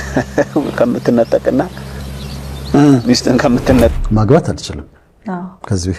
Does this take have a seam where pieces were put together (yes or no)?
yes